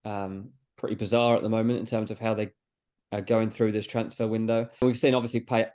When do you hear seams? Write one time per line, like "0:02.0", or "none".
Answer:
0:04.8